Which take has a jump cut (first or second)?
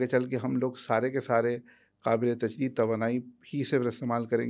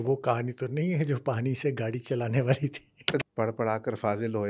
second